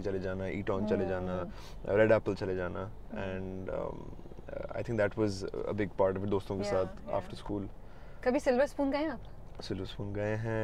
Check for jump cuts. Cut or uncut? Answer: uncut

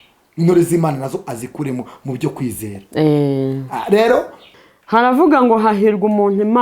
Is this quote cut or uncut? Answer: cut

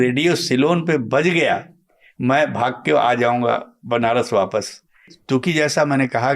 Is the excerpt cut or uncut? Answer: cut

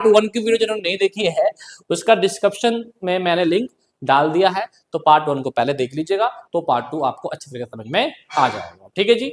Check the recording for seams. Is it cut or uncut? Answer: uncut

